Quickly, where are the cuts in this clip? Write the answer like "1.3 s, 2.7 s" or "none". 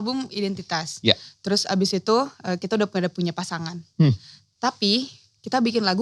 none